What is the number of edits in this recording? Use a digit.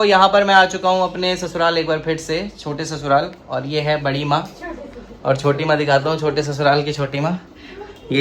0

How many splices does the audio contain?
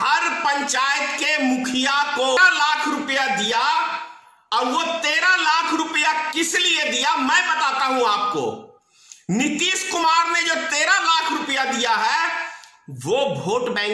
1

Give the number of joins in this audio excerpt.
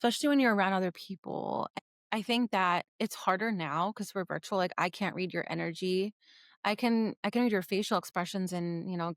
1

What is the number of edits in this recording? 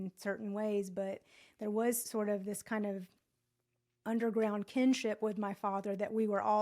1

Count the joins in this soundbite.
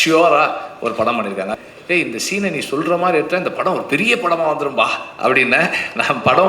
1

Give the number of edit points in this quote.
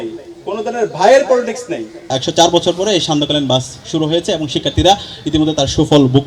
1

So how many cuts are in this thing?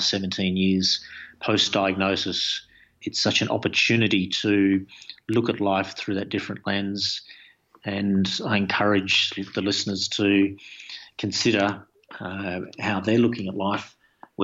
1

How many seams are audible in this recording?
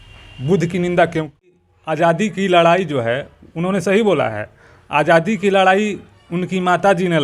1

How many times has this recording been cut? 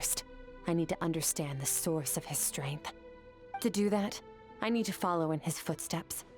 1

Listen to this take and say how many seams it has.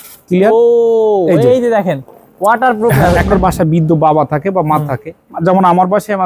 1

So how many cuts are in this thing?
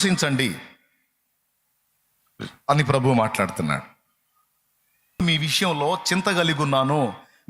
1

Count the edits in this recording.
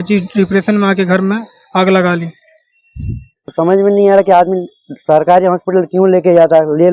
1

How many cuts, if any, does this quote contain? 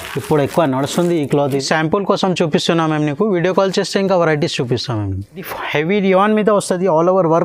2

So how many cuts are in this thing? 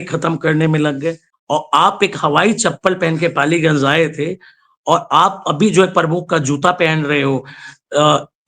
1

